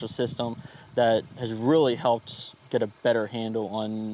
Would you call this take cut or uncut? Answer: cut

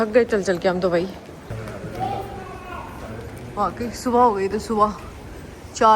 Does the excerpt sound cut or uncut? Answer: uncut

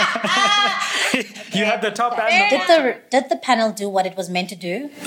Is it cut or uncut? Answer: cut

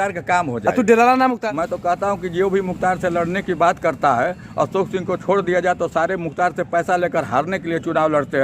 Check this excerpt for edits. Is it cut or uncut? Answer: cut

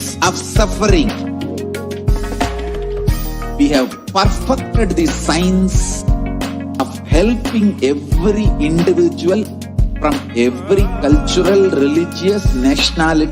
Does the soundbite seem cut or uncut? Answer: cut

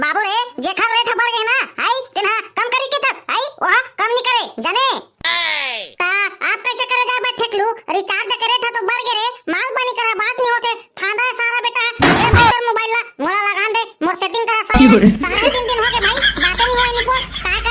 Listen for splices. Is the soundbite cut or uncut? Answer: uncut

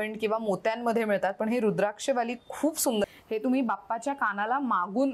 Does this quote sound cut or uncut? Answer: cut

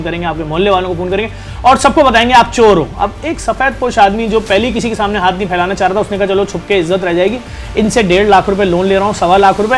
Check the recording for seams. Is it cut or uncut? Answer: uncut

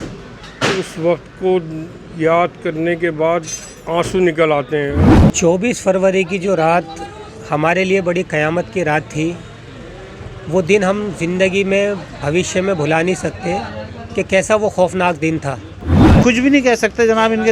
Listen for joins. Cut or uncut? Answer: cut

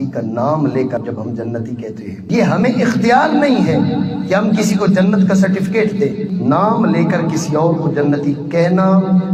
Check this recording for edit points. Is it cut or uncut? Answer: uncut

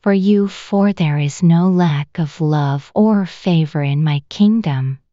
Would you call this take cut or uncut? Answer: cut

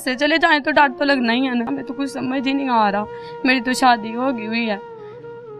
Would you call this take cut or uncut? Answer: cut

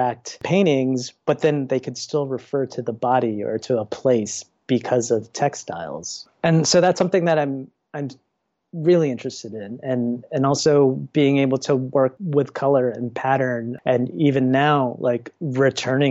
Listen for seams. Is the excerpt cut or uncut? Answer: uncut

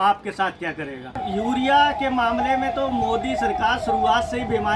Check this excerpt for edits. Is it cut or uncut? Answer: cut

